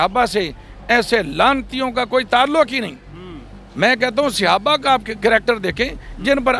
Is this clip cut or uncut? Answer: uncut